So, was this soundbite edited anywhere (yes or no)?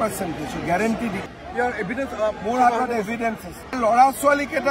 yes